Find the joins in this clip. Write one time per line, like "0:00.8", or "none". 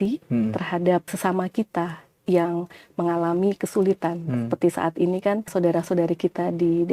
0:01.1
0:05.5